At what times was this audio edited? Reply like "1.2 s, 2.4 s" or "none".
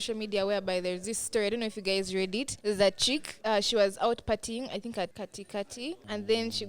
2.5 s, 3.3 s, 5.6 s